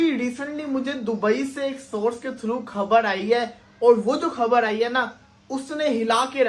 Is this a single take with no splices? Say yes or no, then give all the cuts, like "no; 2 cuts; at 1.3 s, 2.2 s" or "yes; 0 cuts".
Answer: yes; 0 cuts